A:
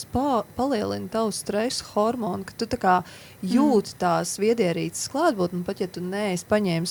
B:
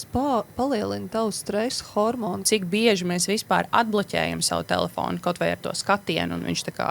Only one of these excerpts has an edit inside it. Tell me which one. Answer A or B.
B